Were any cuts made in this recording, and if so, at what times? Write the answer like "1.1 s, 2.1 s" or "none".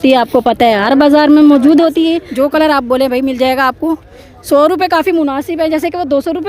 2.2 s